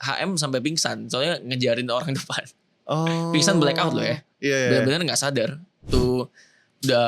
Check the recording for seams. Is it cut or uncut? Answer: cut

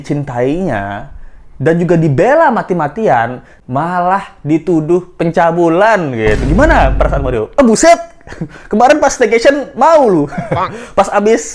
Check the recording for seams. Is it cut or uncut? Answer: cut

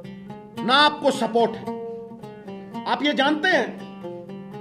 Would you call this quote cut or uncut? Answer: cut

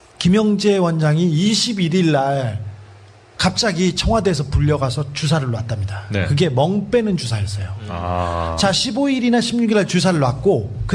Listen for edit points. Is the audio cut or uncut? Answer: uncut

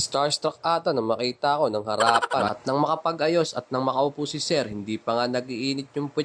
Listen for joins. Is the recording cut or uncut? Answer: cut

